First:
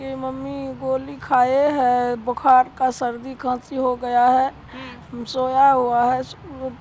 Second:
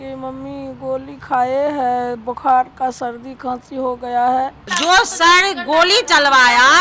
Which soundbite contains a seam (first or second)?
second